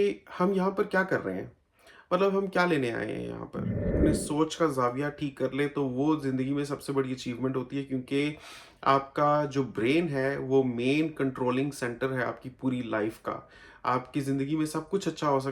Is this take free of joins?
no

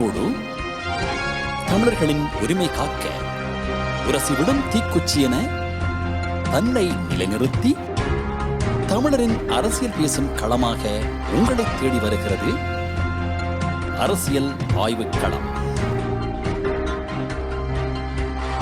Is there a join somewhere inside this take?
no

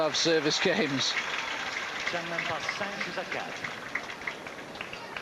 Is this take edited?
no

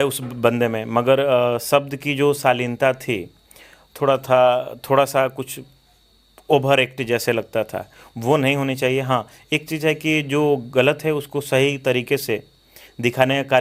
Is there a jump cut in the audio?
no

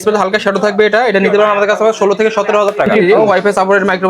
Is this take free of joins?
no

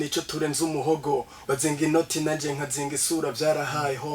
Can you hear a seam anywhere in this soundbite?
yes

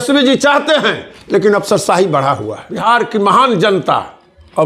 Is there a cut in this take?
yes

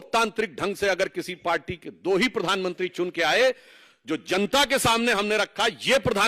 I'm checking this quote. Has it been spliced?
no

